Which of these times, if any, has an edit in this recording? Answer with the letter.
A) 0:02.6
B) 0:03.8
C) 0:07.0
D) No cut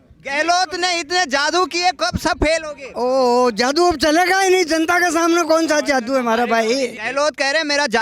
C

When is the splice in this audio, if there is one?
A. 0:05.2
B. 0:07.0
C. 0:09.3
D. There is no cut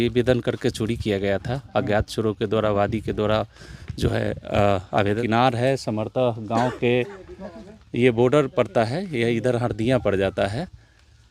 A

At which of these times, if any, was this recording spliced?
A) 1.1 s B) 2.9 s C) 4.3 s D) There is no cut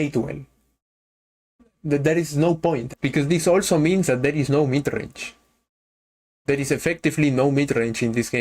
B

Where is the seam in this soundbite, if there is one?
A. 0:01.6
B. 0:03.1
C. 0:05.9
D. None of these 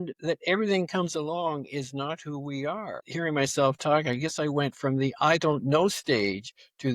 B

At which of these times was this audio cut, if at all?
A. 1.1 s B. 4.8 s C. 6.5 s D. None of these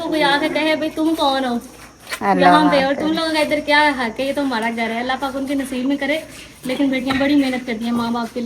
D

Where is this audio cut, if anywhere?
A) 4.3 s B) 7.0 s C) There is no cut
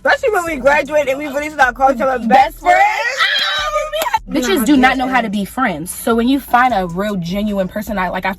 A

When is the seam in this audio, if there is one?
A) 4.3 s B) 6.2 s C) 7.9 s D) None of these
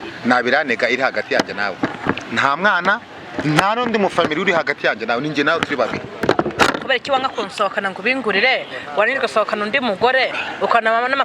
B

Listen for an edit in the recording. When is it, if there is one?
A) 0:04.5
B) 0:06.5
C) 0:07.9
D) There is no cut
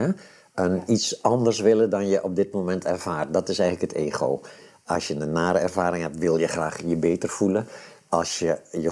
D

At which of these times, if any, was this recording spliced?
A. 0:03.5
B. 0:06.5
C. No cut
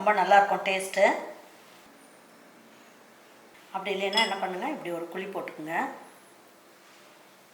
A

